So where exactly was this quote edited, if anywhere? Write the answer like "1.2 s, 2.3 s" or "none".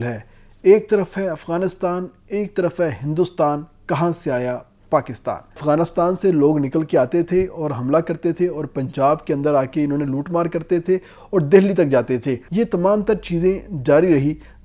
5.6 s, 12.4 s

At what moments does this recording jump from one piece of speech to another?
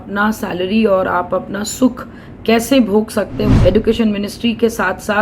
3.6 s

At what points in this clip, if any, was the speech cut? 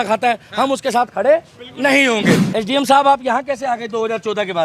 2.4 s

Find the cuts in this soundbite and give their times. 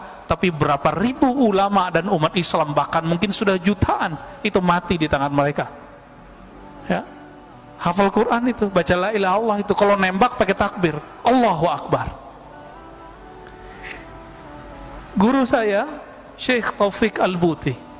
none

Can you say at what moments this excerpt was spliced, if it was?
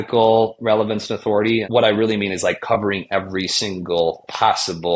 1.7 s

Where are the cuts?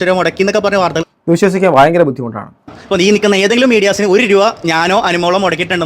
2.8 s

